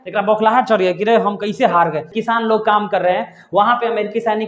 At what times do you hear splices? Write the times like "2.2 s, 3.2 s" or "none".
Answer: 2.1 s